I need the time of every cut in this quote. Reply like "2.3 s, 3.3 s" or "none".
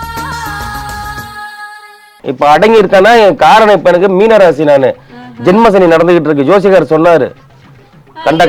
2.1 s